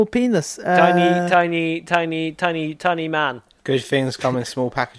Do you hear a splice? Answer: yes; 1 cut; at 3.5 s

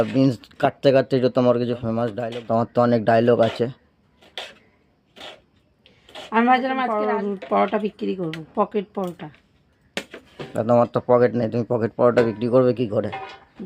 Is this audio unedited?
no; 2 cuts; at 2.1 s, 6.9 s

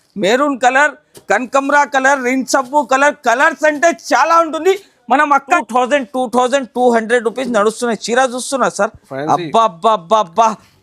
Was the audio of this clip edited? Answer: yes; 1 cut; at 5.6 s

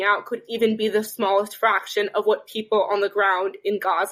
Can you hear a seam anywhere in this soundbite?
no; 0 cuts

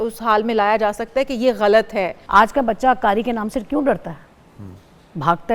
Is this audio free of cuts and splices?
no; 1 cut; at 2.2 s

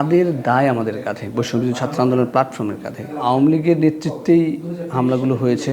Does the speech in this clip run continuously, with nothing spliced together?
no; 1 cut; at 3.1 s

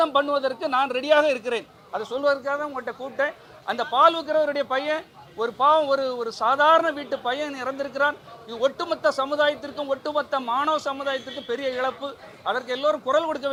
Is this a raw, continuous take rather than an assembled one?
yes; 0 cuts

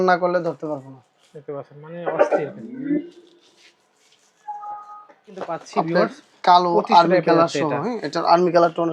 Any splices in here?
yes; 1 cut; at 5.6 s

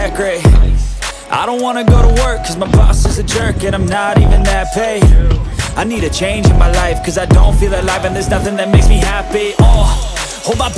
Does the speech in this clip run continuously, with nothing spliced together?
yes; 0 cuts

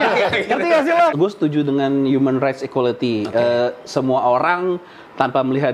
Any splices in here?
yes; 1 cut; at 1.1 s

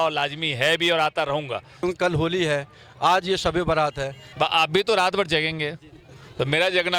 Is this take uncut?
no; 2 cuts; at 1.8 s, 4.2 s

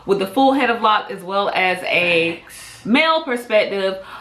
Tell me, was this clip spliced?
no; 0 cuts

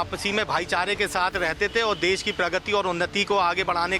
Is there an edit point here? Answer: no; 0 cuts

